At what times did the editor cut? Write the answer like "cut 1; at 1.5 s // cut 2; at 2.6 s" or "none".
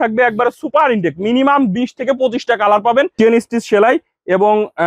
cut 1; at 3.1 s